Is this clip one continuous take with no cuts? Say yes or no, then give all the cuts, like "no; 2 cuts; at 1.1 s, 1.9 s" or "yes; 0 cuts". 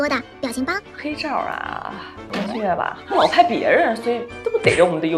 yes; 0 cuts